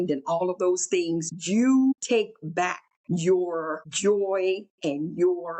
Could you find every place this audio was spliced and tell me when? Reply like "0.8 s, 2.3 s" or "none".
1.3 s, 2.5 s, 3.8 s, 4.7 s